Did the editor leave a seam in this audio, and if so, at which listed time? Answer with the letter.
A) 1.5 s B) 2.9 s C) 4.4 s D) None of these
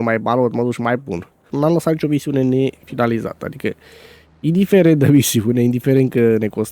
A